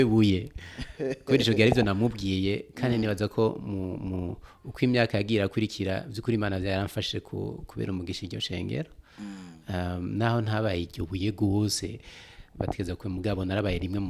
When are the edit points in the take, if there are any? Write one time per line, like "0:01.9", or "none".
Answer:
none